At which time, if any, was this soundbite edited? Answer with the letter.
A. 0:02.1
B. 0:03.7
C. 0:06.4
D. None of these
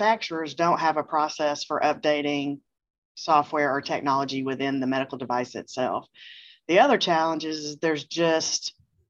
D